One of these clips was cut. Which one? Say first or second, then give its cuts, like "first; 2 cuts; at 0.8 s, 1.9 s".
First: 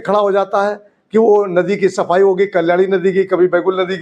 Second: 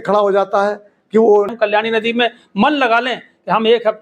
second; 1 cut; at 1.5 s